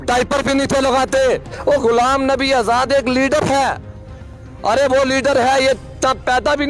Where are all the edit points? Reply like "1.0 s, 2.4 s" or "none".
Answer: 1.5 s